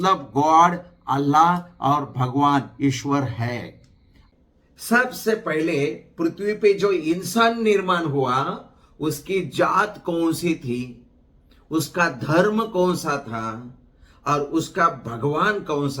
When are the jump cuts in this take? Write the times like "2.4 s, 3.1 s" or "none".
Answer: 4.2 s